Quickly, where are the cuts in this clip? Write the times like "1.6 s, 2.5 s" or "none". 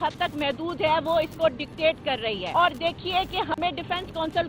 2.4 s